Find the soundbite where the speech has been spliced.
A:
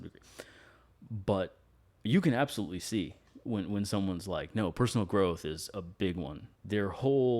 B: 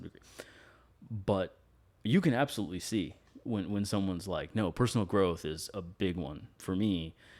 A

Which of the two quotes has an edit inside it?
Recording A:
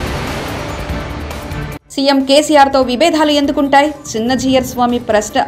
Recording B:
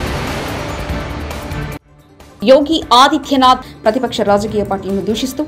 A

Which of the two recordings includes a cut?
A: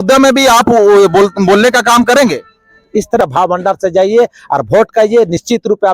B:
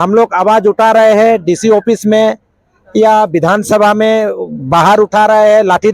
A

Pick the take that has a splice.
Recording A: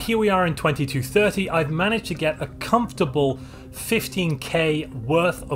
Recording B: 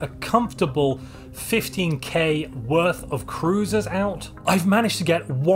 B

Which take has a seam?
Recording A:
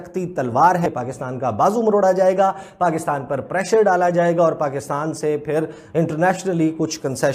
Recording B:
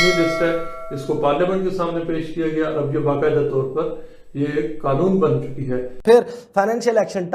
B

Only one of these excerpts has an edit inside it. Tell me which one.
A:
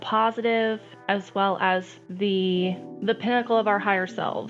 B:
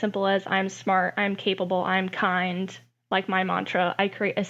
A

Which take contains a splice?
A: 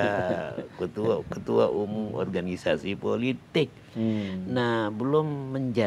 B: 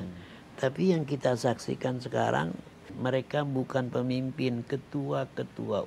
B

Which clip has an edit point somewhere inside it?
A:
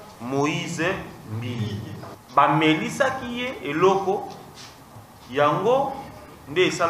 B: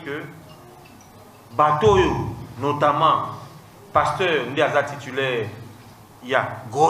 A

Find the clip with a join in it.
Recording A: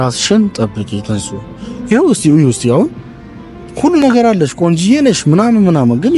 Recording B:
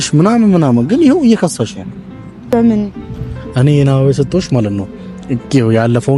B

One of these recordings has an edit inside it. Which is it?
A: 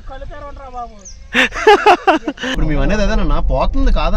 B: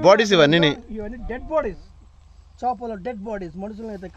A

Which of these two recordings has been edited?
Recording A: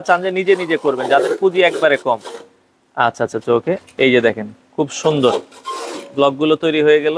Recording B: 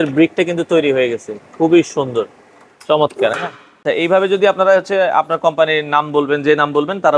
B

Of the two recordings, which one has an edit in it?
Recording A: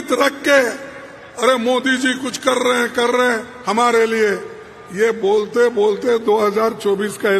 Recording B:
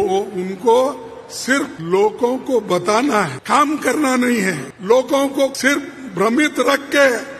B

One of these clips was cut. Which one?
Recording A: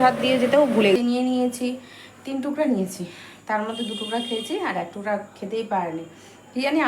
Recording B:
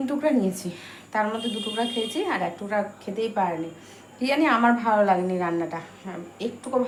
A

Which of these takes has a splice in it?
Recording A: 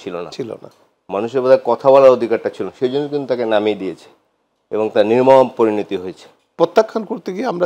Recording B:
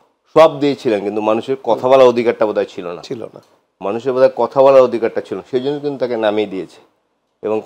A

